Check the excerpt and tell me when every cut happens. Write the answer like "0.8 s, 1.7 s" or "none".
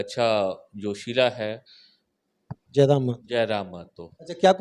none